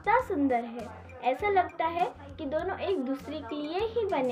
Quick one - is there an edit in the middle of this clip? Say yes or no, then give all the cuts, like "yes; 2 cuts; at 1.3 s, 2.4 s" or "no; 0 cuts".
no; 0 cuts